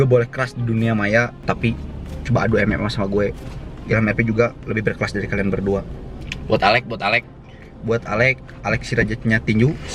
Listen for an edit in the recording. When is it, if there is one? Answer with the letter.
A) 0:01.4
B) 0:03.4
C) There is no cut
A